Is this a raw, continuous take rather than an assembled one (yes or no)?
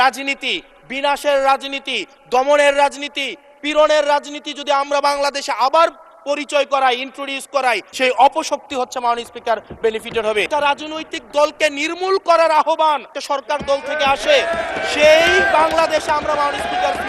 no